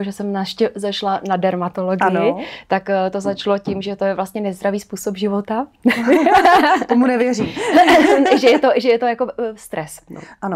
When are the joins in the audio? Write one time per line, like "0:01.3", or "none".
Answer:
none